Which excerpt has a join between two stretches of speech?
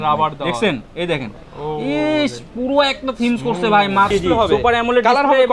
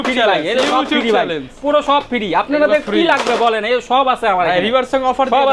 first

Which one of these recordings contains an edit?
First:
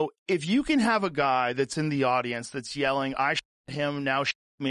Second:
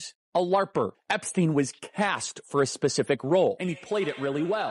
second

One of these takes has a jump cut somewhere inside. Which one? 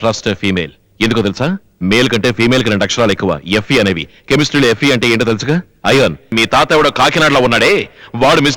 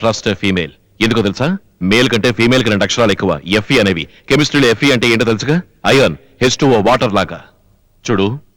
first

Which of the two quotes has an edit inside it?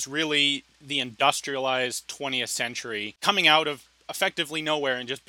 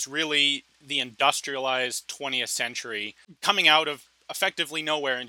first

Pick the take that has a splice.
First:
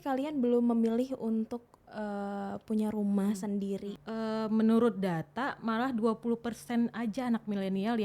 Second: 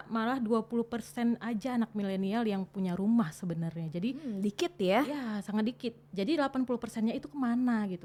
first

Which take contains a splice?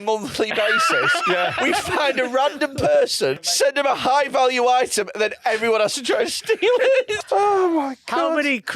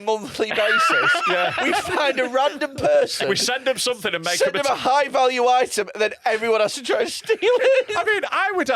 first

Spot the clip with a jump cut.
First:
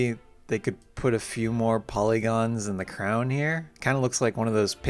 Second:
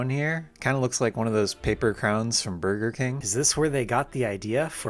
second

